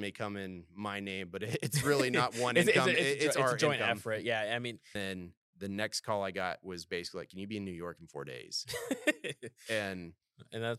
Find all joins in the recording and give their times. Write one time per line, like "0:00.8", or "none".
0:04.9